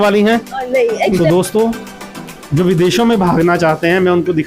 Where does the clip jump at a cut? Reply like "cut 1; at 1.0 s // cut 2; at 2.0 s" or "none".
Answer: cut 1; at 1.2 s